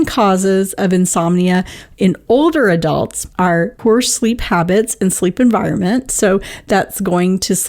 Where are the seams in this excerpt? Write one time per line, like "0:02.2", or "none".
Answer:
0:03.5